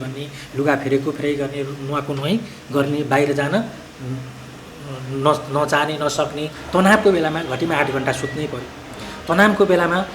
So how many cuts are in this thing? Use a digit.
1